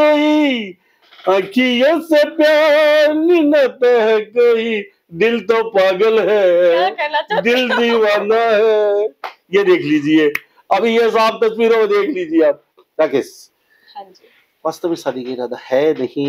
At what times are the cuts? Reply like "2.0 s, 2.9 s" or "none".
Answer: none